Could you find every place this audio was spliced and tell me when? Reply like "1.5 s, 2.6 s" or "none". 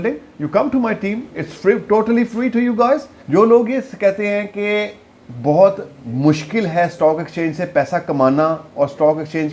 3.1 s